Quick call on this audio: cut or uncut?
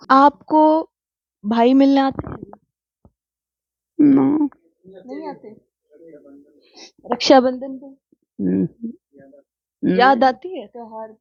uncut